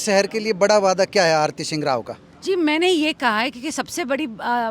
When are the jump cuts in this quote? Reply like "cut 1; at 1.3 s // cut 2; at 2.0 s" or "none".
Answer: none